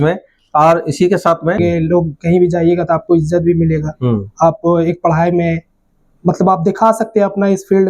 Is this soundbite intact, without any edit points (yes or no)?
no